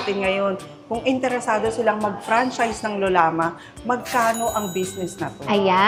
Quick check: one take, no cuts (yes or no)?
yes